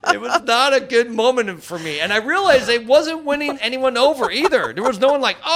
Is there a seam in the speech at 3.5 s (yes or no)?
yes